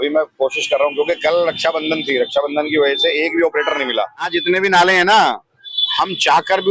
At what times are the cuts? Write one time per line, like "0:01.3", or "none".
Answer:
0:04.3